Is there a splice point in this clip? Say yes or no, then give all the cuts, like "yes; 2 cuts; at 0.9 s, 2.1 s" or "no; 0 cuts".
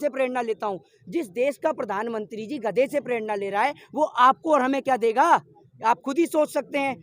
no; 0 cuts